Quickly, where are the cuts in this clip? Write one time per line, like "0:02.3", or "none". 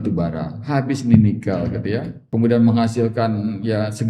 0:02.2